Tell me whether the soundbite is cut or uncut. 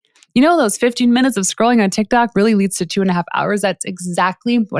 uncut